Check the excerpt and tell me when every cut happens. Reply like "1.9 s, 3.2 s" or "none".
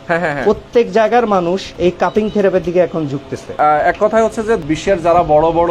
1.7 s, 3.5 s, 4.6 s